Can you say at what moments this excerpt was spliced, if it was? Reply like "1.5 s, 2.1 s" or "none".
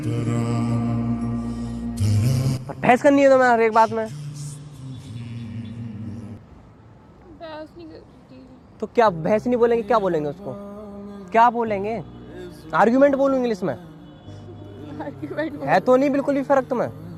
none